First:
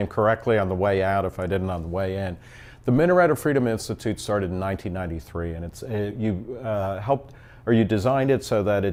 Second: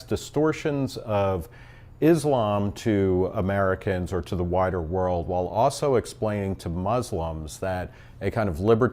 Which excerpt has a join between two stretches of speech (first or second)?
second